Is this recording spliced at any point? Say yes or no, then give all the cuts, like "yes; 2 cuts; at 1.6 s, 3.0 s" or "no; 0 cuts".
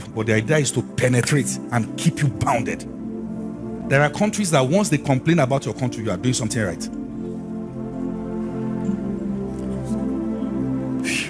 no; 0 cuts